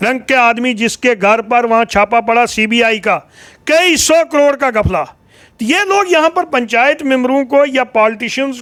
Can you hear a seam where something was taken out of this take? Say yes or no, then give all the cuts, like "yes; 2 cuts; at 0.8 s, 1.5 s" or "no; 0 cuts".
no; 0 cuts